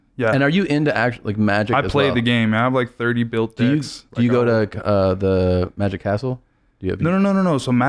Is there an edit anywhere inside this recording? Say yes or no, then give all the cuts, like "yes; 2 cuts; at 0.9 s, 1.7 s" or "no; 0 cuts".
no; 0 cuts